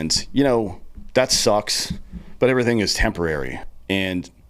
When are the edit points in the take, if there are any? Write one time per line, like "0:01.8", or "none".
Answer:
0:03.6